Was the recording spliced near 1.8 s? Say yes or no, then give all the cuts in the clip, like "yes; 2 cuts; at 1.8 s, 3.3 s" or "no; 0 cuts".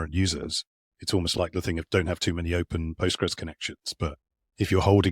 yes; 1 cut; at 1.8 s